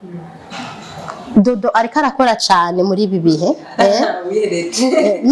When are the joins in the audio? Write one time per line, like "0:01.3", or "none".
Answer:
none